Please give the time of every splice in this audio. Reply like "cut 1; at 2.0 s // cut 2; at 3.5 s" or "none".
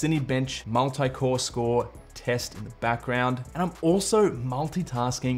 cut 1; at 3.5 s